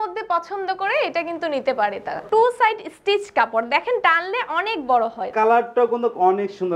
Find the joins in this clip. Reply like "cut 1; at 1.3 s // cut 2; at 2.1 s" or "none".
cut 1; at 2.2 s // cut 2; at 5.2 s